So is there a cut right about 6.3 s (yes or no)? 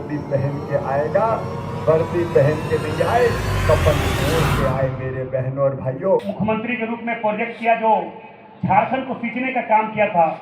yes